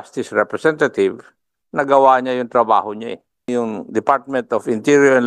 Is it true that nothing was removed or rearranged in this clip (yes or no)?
no